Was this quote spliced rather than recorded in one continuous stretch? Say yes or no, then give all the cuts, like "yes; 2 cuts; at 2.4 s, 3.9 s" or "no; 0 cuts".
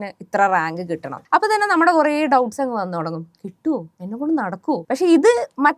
yes; 2 cuts; at 1.1 s, 4.8 s